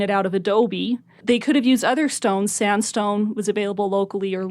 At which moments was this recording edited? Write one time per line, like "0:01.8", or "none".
0:01.1